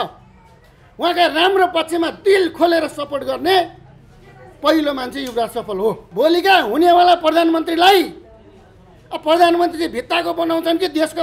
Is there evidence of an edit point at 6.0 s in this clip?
yes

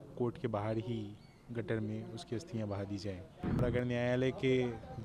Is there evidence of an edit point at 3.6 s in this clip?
yes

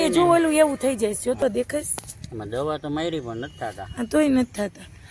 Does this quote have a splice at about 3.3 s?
no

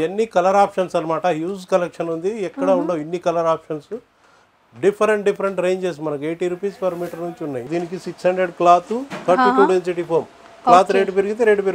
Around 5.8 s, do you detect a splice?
no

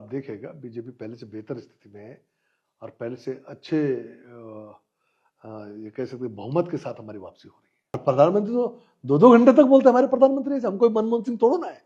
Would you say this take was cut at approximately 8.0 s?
yes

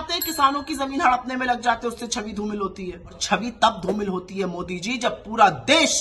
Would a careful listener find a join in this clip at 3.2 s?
yes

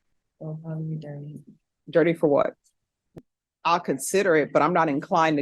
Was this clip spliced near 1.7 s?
no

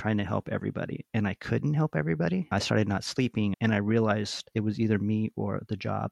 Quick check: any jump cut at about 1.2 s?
no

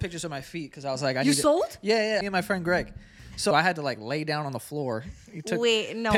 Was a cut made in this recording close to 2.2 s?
yes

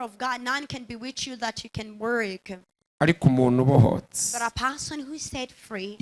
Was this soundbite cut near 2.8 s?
yes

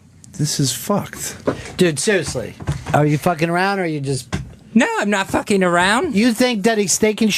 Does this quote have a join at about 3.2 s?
no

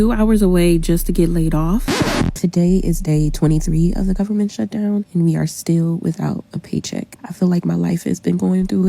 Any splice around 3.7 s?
no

